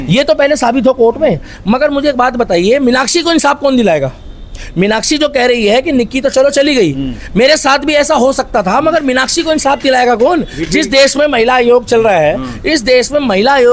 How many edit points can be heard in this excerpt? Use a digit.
0